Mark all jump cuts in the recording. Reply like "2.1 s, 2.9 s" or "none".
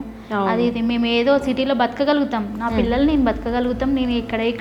none